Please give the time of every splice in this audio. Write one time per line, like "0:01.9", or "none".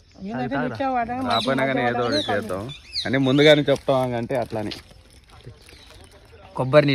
none